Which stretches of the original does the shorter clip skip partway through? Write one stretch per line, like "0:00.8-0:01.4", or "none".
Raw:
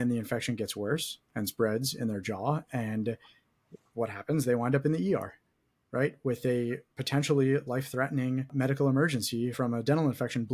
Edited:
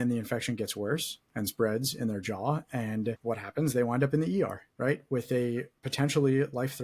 0:03.2-0:03.9
0:05.4-0:05.8